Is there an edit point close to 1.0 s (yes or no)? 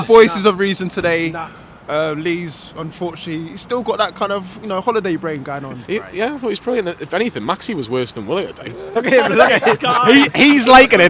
no